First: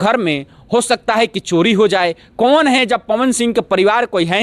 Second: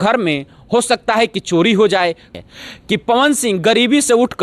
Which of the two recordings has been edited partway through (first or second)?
second